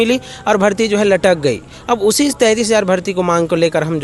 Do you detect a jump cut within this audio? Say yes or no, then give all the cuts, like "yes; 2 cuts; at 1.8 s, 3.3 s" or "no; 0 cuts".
no; 0 cuts